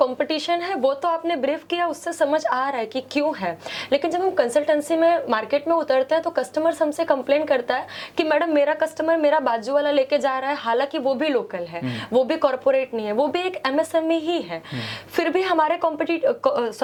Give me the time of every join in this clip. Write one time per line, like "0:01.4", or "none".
none